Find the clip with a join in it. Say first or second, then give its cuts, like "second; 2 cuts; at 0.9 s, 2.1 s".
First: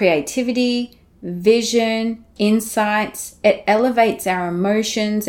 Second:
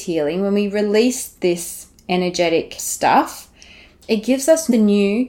second; 1 cut; at 2.8 s